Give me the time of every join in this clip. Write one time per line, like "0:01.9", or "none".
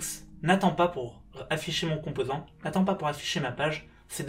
none